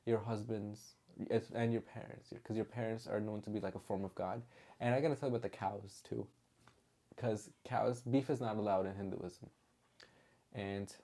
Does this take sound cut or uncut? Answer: uncut